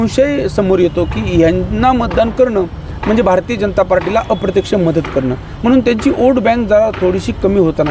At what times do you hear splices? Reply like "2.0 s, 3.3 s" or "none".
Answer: none